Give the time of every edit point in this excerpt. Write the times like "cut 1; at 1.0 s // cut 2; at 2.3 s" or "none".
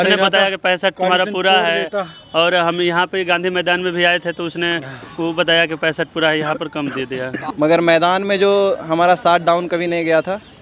cut 1; at 7.4 s